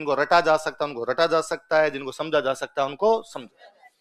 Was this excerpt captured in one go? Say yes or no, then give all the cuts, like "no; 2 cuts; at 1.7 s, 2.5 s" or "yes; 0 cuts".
yes; 0 cuts